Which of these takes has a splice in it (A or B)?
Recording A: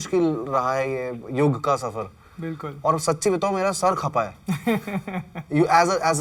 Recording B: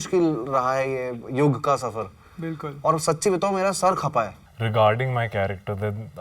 B